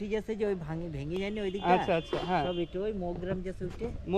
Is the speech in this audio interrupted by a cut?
no; 0 cuts

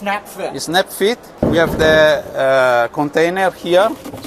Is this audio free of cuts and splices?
no; 1 cut; at 1.3 s

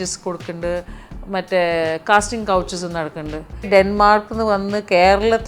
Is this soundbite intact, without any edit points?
no; 1 cut; at 3.7 s

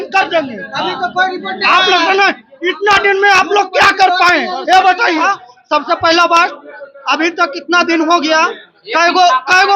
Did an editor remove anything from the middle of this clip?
yes; 1 cut; at 5.2 s

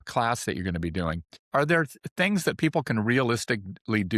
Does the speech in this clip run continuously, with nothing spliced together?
no; 1 cut; at 1.3 s

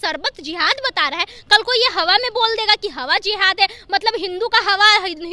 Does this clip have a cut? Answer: no; 0 cuts

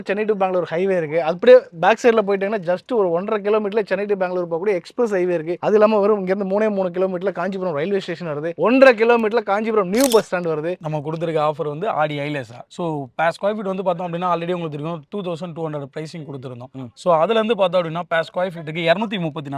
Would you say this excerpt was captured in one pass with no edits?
no; 2 cuts; at 5.6 s, 10.8 s

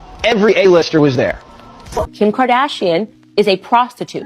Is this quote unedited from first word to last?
no; 1 cut; at 2.1 s

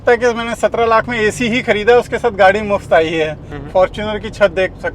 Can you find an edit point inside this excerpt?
yes; 1 cut; at 3.4 s

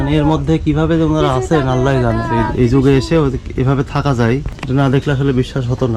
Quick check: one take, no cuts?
no; 2 cuts; at 2.3 s, 4.5 s

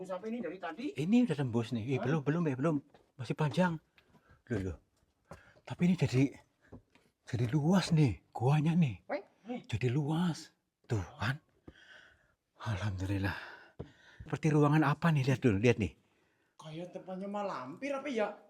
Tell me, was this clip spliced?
yes; 1 cut; at 14.3 s

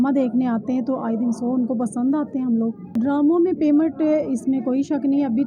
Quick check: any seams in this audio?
yes; 1 cut; at 2.9 s

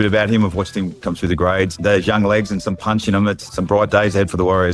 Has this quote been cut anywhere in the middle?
yes; 2 cuts; at 1.7 s, 3.4 s

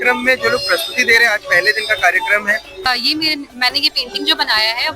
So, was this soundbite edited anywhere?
yes; 1 cut; at 2.9 s

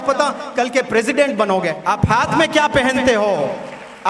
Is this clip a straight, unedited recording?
no; 1 cut; at 2.0 s

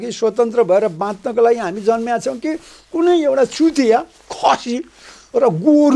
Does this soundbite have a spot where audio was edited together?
no; 0 cuts

